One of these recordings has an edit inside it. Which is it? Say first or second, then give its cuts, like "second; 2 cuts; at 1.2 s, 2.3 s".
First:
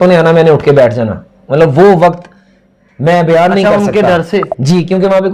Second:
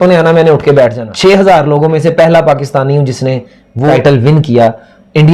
second; 2 cuts; at 1.0 s, 3.9 s